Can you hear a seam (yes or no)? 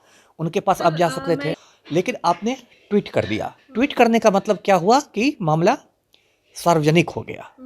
yes